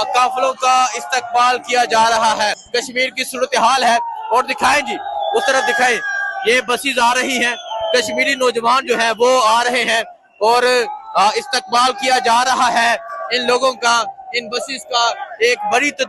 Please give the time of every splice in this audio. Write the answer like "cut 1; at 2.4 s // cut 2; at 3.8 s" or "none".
cut 1; at 2.6 s